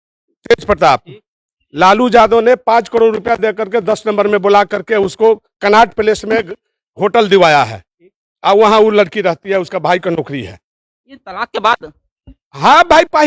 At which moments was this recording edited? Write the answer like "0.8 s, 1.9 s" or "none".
none